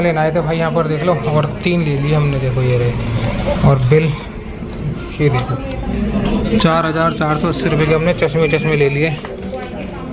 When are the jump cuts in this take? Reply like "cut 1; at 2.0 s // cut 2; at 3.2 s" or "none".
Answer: none